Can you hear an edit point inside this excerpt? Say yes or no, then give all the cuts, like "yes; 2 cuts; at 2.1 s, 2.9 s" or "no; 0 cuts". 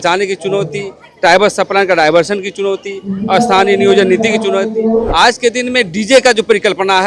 yes; 1 cut; at 5.1 s